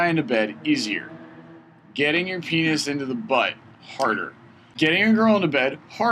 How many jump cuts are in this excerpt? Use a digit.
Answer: 1